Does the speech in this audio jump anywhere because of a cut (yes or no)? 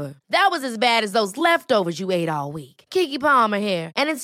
no